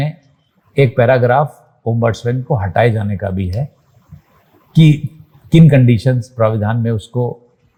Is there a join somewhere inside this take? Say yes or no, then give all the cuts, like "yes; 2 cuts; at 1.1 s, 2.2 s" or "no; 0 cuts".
no; 0 cuts